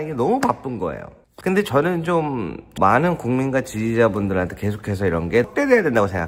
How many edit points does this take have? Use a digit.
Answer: 0